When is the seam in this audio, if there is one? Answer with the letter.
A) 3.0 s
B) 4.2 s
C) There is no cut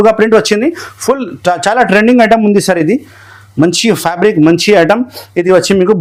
C